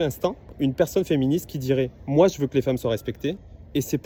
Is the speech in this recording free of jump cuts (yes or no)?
yes